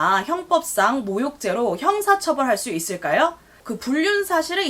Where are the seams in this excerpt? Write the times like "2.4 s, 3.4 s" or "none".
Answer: 3.7 s